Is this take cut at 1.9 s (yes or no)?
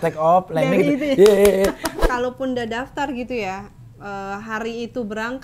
yes